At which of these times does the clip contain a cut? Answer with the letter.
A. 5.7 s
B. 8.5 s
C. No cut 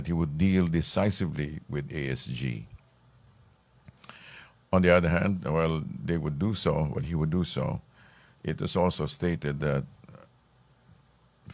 A